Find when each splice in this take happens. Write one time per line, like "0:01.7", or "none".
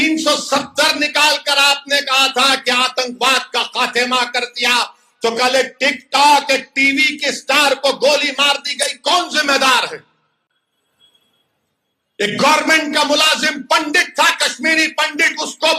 none